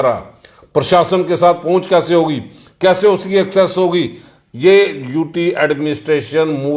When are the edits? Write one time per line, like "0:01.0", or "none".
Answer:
none